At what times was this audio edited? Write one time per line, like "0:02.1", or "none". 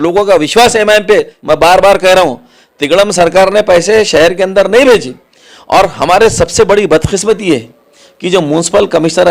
0:01.3